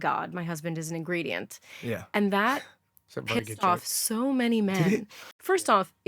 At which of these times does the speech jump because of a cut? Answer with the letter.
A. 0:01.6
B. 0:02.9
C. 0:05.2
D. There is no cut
C